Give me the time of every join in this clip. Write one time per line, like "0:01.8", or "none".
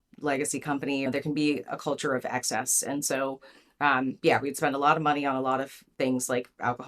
0:01.0